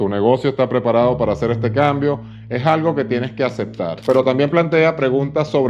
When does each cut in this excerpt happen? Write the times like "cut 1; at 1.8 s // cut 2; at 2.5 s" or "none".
cut 1; at 4.0 s